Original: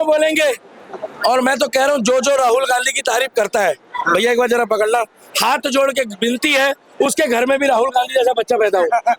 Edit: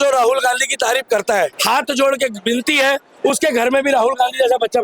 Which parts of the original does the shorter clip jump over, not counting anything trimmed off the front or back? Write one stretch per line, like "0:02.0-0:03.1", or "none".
0:03.8-0:05.3